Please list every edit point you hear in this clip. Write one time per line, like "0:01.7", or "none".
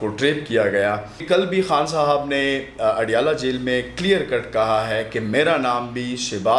0:01.1